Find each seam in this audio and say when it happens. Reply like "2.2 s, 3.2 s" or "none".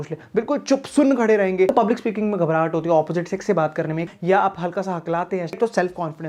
1.7 s, 4.1 s, 5.6 s